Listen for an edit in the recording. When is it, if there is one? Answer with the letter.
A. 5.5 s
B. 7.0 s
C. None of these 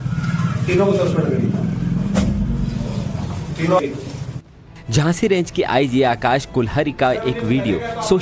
C